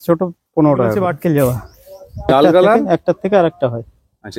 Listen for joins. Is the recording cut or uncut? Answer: cut